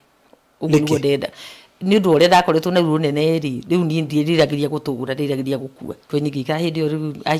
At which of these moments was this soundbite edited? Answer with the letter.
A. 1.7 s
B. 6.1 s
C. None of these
B